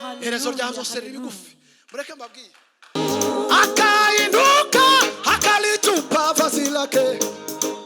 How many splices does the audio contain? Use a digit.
1